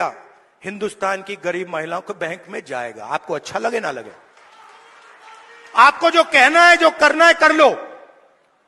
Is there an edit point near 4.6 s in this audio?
no; 0 cuts

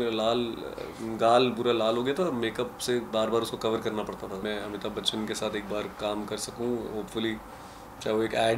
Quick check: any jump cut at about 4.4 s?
yes; 1 cut; at 4.4 s

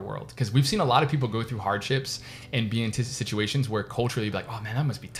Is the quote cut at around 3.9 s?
no; 0 cuts

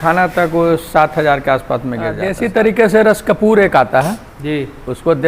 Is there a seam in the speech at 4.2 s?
no; 1 cut; at 2.3 s

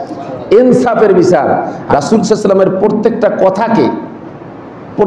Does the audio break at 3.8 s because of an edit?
no; 1 cut; at 1.7 s

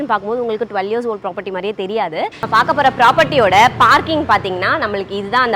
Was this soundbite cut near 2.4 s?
yes; 1 cut; at 2.4 s

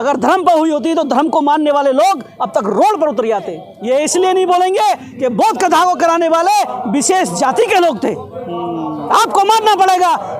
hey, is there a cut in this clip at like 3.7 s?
yes; 1 cut; at 3.7 s

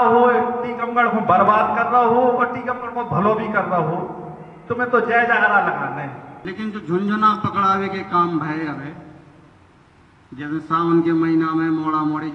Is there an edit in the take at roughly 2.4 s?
no; 1 cut; at 6.5 s

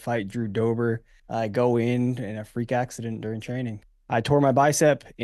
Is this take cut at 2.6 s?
no; 2 cuts; at 1.1 s, 3.9 s

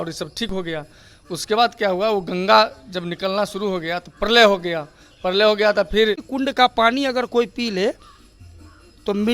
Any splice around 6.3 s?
yes; 1 cut; at 6.3 s

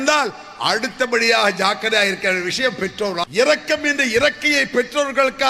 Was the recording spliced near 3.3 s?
yes; 1 cut; at 3.3 s

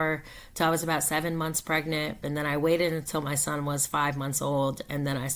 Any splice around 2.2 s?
yes; 1 cut; at 2.2 s

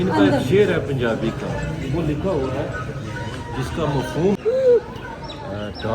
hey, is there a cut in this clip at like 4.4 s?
yes; 1 cut; at 4.4 s

